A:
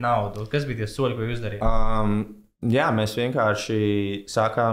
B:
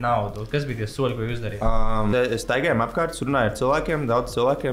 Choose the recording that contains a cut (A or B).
B